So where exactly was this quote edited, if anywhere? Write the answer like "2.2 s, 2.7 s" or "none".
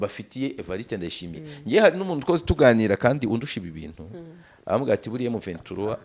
none